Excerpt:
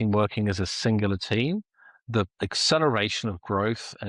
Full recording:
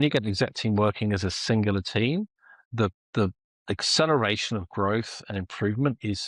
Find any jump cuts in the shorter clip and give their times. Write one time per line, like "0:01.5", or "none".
0:02.3